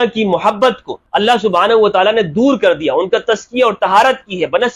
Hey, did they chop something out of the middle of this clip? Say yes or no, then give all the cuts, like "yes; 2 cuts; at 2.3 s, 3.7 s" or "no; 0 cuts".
yes; 1 cut; at 0.9 s